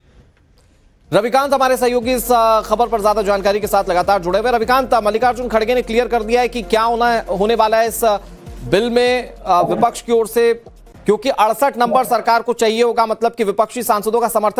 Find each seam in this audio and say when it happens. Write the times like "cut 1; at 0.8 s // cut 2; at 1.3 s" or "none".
none